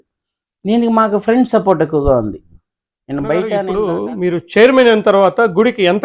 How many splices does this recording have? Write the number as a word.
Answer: one